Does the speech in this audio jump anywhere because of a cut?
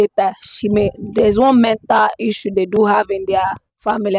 no; 0 cuts

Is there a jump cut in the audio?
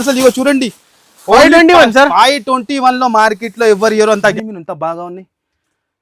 yes; 1 cut; at 4.3 s

